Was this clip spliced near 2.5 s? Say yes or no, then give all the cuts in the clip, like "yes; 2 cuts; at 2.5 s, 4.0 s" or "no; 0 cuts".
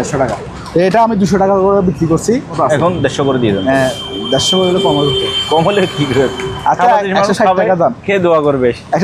yes; 1 cut; at 2.5 s